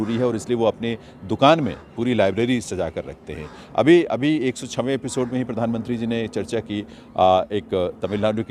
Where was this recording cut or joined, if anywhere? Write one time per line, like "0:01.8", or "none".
none